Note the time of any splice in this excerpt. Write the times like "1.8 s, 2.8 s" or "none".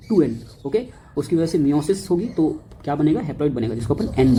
none